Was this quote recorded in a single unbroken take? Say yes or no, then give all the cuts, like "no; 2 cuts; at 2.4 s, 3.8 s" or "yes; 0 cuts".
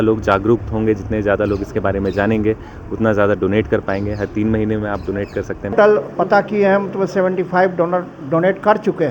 no; 1 cut; at 5.7 s